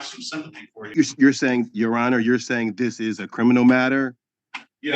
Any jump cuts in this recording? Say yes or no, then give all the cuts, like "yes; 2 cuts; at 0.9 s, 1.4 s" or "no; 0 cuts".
yes; 1 cut; at 0.9 s